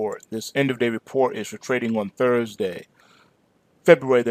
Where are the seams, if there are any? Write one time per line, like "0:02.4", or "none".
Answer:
none